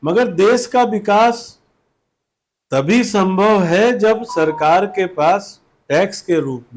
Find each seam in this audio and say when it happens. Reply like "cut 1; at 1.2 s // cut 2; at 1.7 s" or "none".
none